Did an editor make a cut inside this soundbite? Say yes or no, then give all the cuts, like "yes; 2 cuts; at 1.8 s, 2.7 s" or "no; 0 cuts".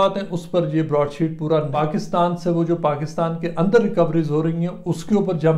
yes; 1 cut; at 1.7 s